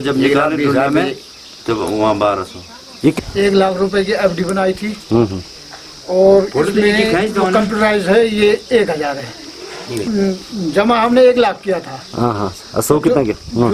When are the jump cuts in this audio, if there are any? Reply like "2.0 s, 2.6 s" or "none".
none